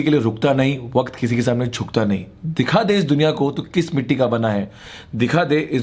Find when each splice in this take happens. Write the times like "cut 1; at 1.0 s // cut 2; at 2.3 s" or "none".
none

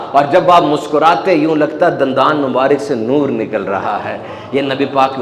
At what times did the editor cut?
none

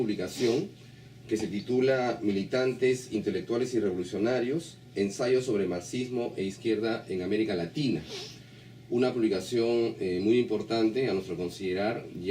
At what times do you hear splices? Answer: cut 1; at 8.9 s

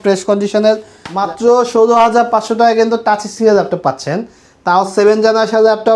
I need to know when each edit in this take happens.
cut 1; at 1.1 s

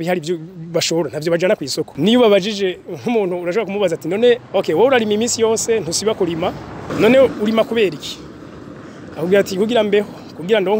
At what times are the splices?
cut 1; at 1.9 s // cut 2; at 4.5 s // cut 3; at 6.9 s

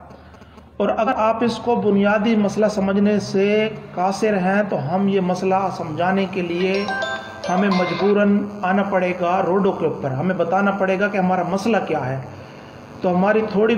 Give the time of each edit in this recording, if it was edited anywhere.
cut 1; at 1.1 s

